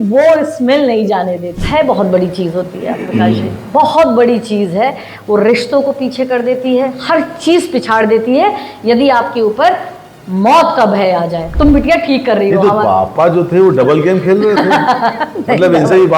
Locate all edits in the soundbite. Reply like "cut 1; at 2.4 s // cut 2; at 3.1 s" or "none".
cut 1; at 1.5 s // cut 2; at 11.5 s